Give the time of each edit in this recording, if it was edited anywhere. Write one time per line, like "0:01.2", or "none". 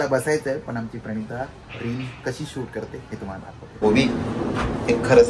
0:03.8